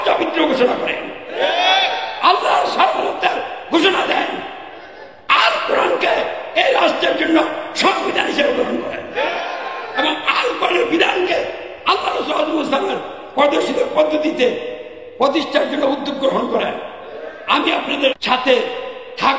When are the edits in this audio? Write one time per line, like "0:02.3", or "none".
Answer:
0:18.2